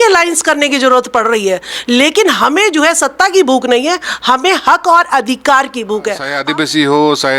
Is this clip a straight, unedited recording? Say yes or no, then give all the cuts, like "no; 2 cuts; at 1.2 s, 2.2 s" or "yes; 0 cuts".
no; 1 cut; at 6.3 s